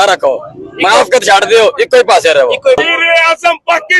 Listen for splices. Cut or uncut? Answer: cut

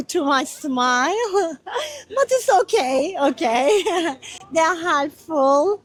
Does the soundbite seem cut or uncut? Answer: uncut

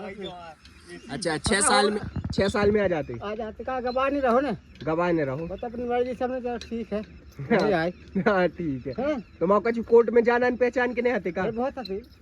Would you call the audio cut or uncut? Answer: uncut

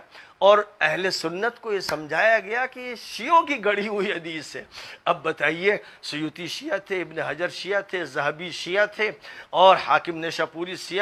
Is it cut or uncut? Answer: uncut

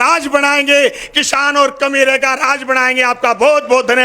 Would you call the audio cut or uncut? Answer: uncut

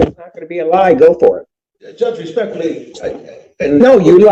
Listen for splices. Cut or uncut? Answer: uncut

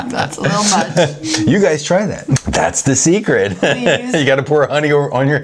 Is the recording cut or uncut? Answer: cut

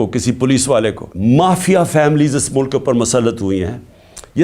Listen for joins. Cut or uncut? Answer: cut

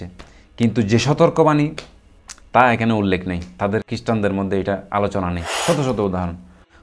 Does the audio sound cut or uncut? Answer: cut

